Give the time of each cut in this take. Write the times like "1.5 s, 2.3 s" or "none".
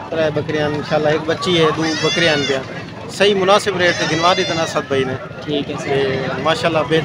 none